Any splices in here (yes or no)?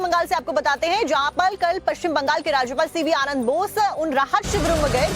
no